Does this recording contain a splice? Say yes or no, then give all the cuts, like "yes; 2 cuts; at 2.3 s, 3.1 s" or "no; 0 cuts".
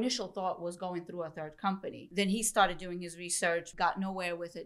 yes; 2 cuts; at 2.0 s, 3.7 s